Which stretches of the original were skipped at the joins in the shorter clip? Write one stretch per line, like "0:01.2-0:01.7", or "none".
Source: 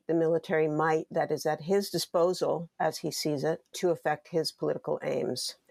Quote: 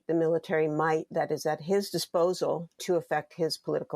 0:02.7-0:03.6